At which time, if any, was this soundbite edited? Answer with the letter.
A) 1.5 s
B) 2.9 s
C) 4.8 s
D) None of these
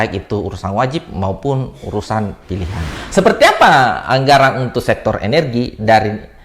B